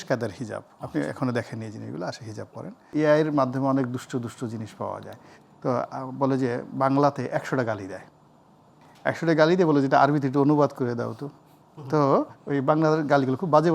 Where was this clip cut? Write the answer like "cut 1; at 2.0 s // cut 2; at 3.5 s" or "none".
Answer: cut 1; at 2.9 s

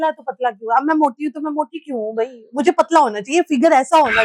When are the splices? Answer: none

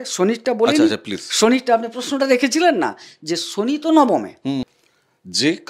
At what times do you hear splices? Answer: cut 1; at 4.7 s

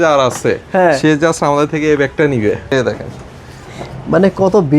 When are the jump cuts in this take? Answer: cut 1; at 2.7 s

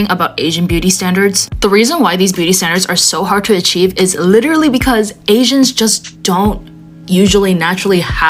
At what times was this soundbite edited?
none

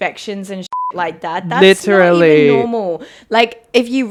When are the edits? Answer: none

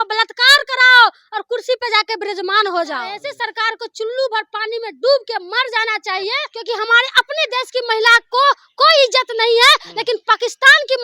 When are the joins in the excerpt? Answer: cut 1; at 3.2 s // cut 2; at 6.5 s

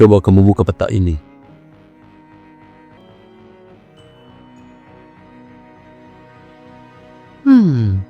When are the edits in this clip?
cut 1; at 3.0 s

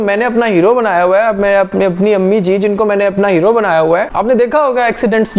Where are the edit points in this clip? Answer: cut 1; at 4.1 s

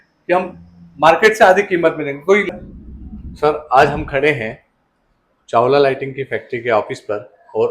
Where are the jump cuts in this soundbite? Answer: cut 1; at 2.5 s

